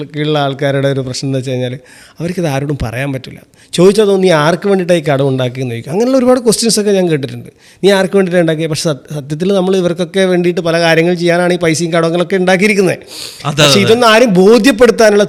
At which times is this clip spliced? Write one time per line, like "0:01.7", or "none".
none